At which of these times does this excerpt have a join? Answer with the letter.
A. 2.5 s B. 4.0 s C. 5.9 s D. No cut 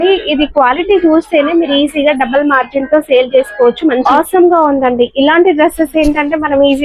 B